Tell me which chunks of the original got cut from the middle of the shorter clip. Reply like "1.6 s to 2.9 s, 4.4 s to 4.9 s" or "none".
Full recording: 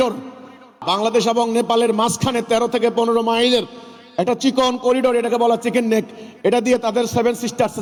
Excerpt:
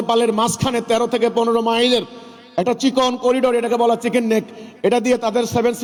none